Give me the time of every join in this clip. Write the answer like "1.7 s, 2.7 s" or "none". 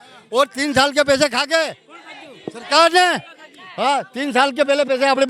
none